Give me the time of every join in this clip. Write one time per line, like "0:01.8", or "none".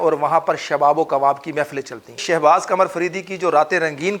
0:02.2